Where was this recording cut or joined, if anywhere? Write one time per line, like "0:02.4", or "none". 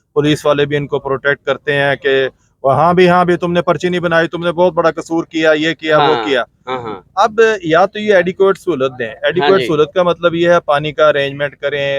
none